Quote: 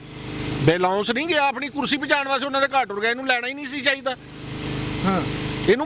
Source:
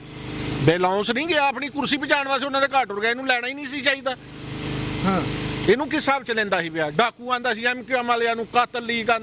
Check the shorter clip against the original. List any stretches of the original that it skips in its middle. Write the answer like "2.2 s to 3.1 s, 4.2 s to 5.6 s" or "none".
none